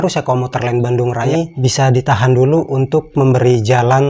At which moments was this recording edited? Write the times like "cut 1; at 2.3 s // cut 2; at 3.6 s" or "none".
cut 1; at 1.3 s

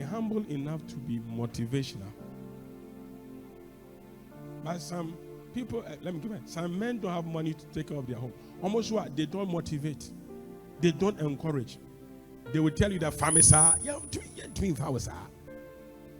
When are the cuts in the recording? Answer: none

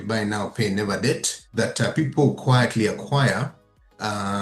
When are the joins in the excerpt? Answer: cut 1; at 1.4 s

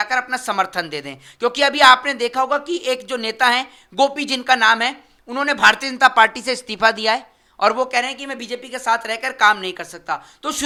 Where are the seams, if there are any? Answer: none

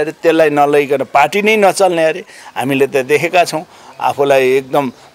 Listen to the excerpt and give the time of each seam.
none

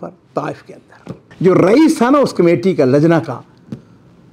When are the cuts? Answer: cut 1; at 1.2 s

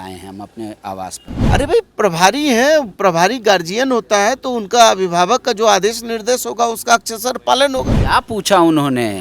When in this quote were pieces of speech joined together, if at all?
cut 1; at 1.4 s // cut 2; at 8.0 s

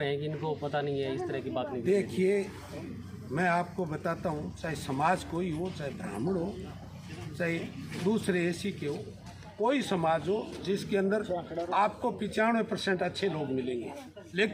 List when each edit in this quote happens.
none

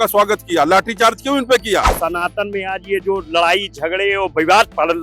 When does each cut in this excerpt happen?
cut 1; at 1.9 s

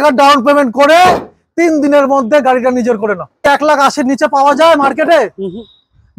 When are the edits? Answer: cut 1; at 3.4 s

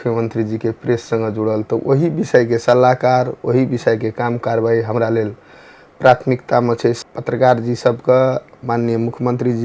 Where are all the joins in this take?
cut 1; at 7.0 s

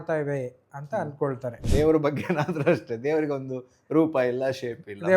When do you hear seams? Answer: cut 1; at 1.6 s

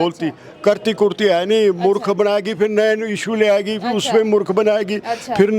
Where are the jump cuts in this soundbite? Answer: none

